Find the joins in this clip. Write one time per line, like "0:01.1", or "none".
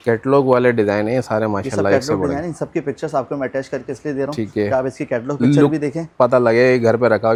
none